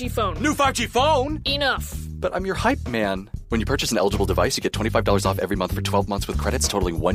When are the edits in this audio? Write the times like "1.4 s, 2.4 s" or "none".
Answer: none